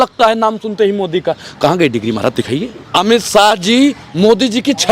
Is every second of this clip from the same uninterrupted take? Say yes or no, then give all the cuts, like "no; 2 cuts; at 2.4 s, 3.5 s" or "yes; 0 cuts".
no; 1 cut; at 2.8 s